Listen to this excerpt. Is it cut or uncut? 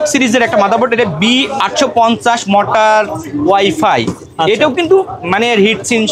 uncut